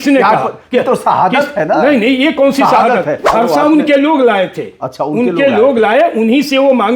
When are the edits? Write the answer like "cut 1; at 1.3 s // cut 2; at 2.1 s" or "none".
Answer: cut 1; at 3.2 s